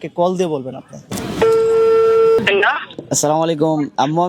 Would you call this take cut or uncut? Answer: cut